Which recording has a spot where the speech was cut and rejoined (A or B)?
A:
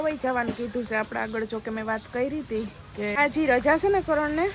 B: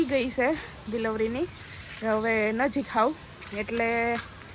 A